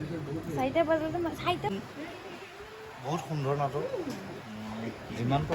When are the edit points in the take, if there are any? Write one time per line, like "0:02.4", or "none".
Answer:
0:01.7